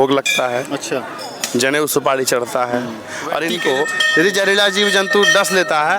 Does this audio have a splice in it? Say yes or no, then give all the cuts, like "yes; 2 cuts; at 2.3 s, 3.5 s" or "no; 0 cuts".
yes; 1 cut; at 3.5 s